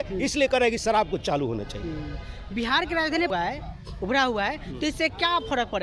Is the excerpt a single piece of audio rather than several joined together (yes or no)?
yes